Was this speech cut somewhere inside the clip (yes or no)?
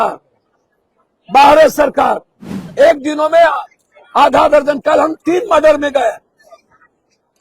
yes